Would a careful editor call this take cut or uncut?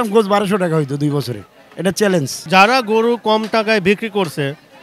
uncut